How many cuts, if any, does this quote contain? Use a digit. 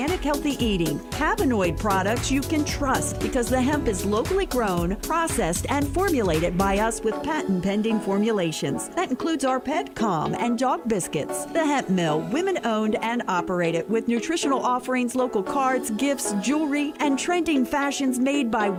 0